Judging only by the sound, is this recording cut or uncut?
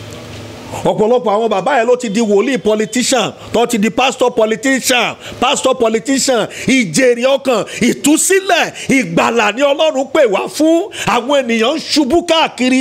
uncut